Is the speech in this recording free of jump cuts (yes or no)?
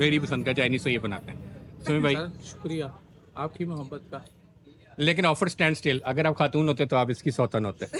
yes